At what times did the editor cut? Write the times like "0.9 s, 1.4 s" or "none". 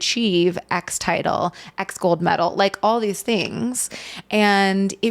none